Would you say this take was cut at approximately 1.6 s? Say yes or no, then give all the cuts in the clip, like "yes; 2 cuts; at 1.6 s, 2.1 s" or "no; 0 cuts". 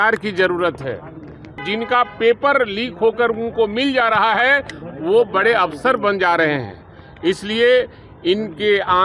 yes; 1 cut; at 1.6 s